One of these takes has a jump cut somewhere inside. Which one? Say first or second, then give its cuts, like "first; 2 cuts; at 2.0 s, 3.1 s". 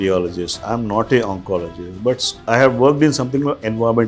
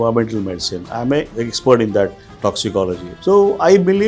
second; 2 cuts; at 1.3 s, 3.1 s